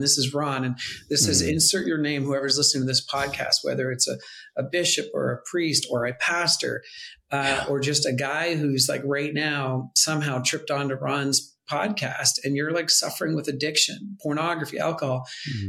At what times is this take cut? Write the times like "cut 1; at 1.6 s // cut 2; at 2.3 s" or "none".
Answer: none